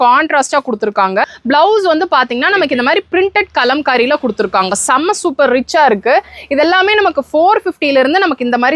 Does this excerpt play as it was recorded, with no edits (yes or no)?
no